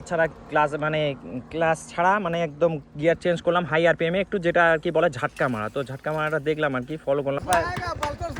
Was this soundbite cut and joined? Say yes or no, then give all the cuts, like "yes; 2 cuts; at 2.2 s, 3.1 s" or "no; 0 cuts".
yes; 1 cut; at 7.4 s